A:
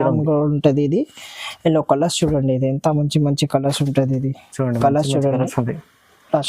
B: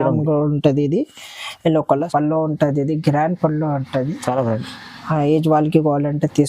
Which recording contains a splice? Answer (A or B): B